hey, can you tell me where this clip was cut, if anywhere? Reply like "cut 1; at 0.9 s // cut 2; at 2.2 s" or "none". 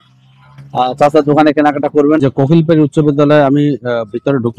cut 1; at 2.2 s